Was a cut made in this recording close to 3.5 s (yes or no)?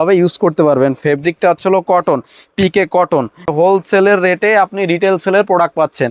yes